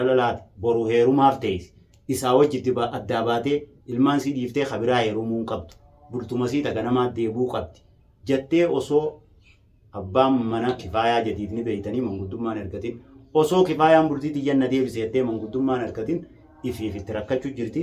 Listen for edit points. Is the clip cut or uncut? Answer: uncut